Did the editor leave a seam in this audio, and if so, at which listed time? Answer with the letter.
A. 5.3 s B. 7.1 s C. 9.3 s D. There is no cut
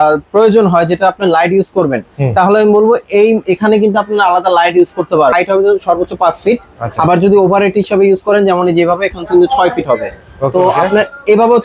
A